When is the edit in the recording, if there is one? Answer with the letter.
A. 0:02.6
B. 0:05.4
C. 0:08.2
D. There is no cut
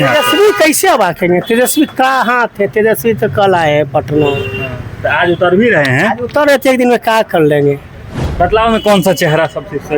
C